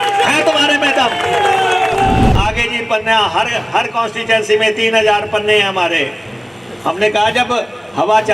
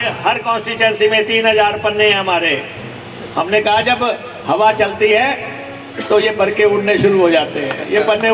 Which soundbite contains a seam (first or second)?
first